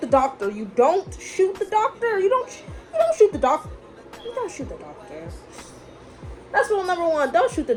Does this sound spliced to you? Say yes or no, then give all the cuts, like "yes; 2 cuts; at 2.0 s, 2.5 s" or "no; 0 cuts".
no; 0 cuts